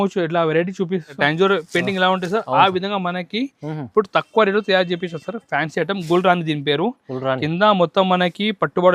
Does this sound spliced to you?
yes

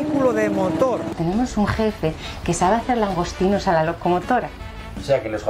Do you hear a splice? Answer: yes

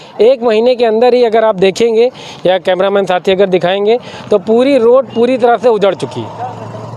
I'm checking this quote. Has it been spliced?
no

